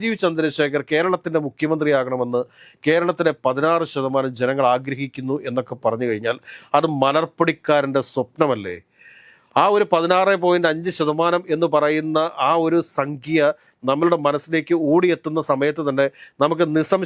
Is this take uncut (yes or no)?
yes